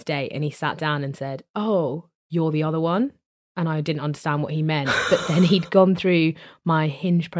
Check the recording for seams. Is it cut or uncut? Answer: uncut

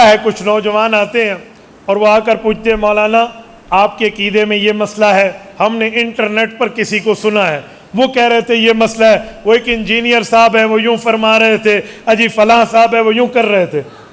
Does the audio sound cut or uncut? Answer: uncut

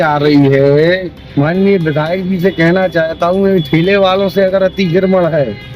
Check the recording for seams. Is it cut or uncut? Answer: cut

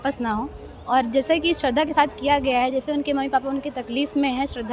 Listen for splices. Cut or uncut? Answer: uncut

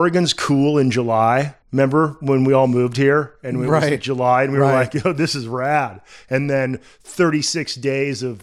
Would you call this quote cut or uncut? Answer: cut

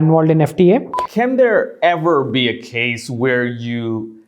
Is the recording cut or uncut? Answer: cut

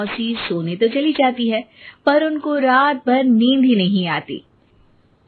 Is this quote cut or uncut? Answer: uncut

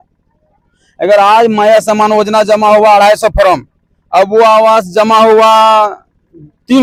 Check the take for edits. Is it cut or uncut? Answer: uncut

